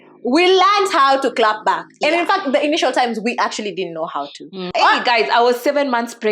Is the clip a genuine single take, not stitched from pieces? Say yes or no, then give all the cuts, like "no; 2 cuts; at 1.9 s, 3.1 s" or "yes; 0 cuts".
no; 1 cut; at 4.7 s